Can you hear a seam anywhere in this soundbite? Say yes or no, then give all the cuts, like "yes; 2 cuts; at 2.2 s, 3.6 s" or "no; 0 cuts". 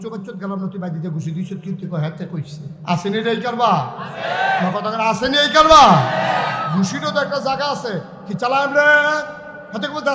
yes; 1 cut; at 2.7 s